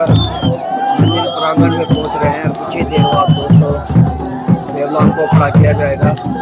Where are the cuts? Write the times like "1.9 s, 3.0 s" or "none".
none